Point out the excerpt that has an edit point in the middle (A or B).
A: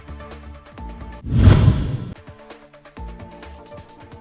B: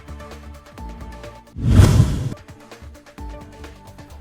B